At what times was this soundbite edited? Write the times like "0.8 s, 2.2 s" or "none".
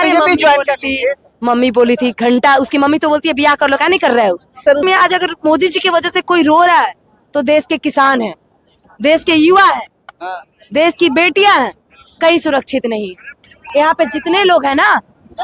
4.8 s